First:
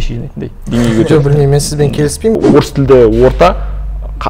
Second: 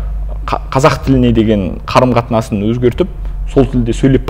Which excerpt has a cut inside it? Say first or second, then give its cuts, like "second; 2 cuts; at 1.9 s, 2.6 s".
first; 1 cut; at 2.4 s